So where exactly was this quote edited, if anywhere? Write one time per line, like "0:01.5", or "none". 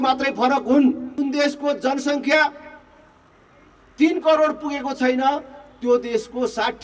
0:01.1